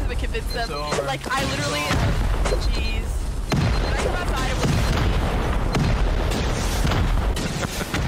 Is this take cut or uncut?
uncut